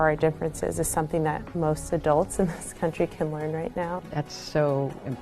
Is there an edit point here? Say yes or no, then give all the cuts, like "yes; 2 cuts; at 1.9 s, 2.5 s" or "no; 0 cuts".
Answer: yes; 2 cuts; at 1.5 s, 4.0 s